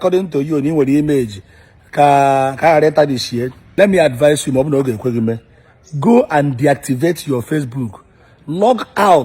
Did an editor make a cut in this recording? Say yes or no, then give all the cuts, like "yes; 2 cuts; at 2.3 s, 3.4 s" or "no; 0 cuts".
yes; 1 cut; at 3.6 s